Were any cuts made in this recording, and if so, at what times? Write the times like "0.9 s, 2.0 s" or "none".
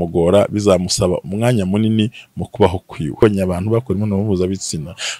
3.2 s